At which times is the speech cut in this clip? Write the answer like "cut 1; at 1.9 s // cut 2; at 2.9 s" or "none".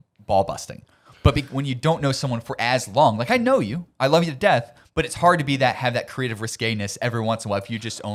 none